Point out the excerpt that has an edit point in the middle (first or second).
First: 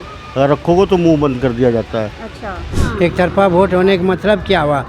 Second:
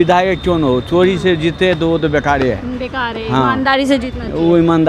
first